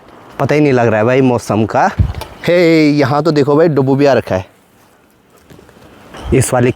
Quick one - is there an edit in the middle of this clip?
no; 0 cuts

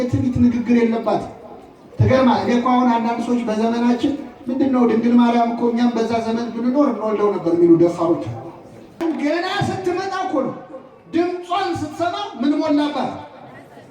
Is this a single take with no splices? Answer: no; 1 cut; at 9.0 s

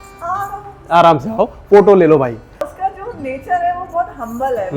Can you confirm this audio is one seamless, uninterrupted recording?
no; 1 cut; at 2.6 s

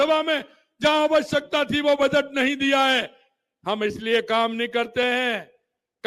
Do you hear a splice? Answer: no; 0 cuts

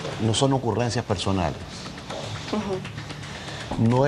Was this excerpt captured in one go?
yes; 0 cuts

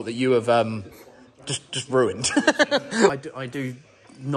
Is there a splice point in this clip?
yes; 1 cut; at 3.1 s

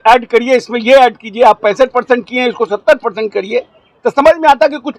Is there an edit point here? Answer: no; 0 cuts

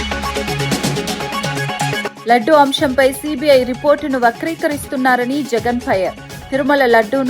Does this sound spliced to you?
yes; 1 cut; at 2.2 s

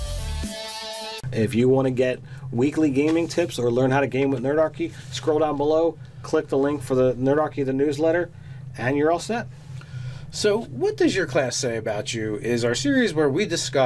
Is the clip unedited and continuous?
no; 1 cut; at 8.1 s

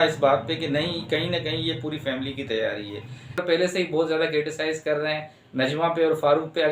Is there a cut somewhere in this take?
yes; 1 cut; at 3.4 s

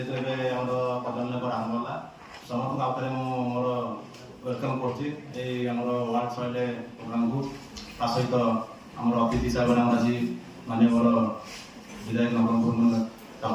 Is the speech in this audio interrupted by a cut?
no; 0 cuts

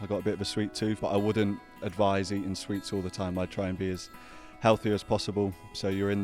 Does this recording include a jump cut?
yes; 1 cut; at 1.0 s

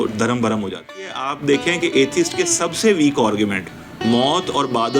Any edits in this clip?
yes; 1 cut; at 1.2 s

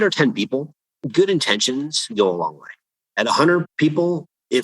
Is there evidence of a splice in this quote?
yes; 1 cut; at 2.9 s

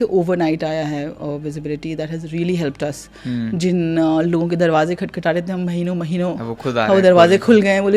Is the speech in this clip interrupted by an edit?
no; 0 cuts

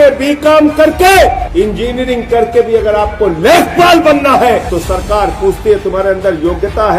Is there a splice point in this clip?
yes; 2 cuts; at 1.4 s, 4.7 s

